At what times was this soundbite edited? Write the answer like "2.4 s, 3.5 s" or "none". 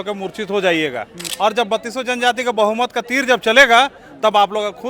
1.2 s